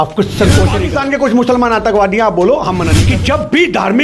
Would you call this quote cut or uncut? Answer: cut